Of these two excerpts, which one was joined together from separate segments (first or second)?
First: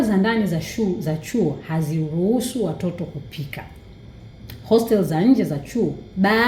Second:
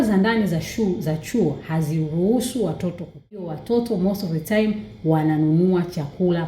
second